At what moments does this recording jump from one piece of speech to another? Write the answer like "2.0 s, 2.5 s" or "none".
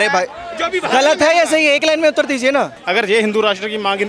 2.8 s

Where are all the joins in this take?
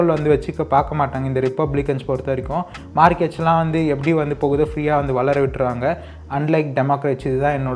none

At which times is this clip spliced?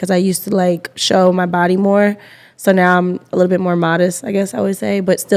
none

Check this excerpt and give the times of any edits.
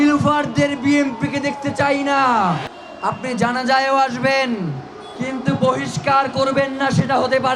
2.6 s

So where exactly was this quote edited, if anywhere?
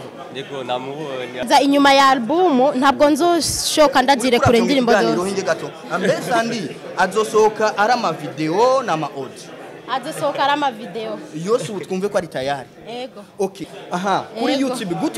1.5 s, 13.7 s

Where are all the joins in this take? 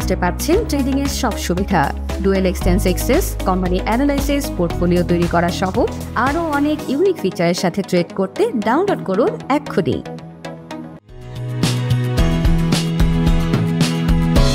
11.0 s

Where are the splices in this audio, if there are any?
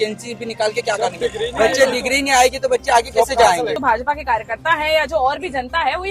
3.8 s

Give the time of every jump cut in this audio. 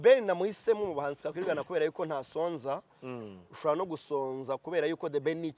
none

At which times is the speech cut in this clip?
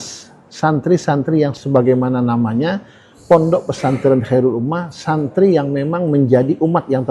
1.6 s

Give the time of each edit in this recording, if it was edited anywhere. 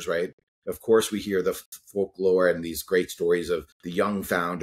1.7 s, 3.8 s

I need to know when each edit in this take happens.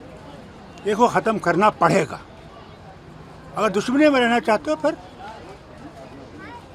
none

